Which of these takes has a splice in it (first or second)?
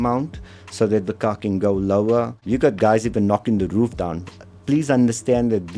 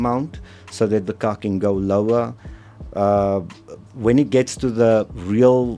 first